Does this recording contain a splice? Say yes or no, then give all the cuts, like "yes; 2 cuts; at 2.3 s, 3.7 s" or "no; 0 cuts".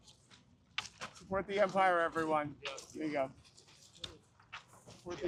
no; 0 cuts